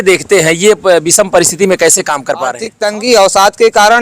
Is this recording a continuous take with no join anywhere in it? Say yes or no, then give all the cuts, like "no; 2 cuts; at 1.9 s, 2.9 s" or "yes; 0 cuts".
no; 1 cut; at 2.7 s